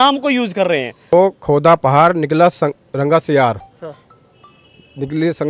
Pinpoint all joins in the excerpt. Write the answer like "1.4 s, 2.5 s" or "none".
1.1 s